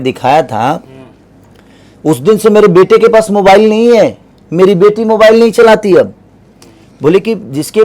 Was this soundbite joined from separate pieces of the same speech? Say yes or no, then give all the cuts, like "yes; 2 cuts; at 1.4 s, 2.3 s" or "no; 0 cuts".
no; 0 cuts